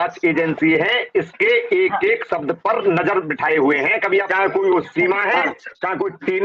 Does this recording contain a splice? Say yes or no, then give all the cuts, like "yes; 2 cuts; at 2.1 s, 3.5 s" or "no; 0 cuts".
yes; 1 cut; at 4.3 s